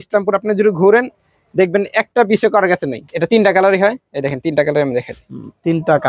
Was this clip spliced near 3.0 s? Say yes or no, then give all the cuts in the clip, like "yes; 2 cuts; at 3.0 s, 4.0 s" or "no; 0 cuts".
yes; 1 cut; at 3.0 s